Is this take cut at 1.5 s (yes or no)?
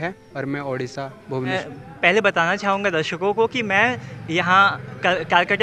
yes